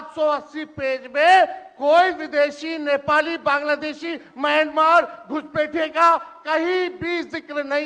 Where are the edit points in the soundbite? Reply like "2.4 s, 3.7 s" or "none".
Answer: none